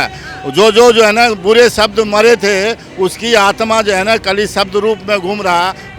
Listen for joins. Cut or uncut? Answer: uncut